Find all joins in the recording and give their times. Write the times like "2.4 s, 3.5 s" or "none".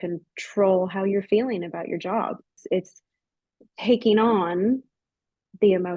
none